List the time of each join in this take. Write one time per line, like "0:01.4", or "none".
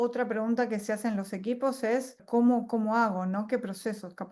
0:02.2